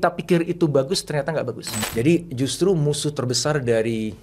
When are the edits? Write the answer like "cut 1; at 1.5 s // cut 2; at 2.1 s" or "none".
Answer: cut 1; at 1.7 s